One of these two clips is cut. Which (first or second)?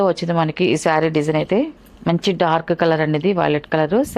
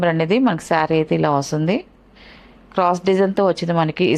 first